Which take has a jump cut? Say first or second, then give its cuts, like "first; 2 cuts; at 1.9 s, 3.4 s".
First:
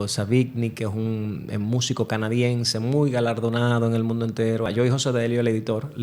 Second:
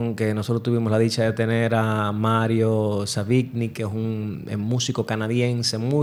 first; 1 cut; at 4.7 s